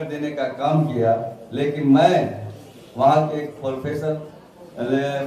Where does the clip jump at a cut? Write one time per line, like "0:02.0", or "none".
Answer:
none